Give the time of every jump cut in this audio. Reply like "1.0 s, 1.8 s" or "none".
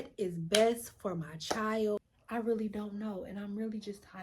2.1 s